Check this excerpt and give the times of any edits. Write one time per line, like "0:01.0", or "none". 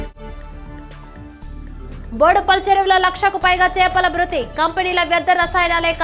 0:01.5